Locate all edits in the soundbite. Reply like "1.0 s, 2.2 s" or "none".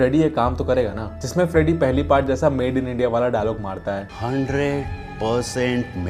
none